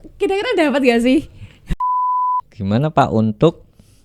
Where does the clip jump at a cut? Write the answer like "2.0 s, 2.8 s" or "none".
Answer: 2.0 s